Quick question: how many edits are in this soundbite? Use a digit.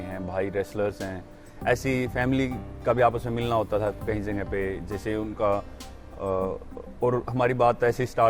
1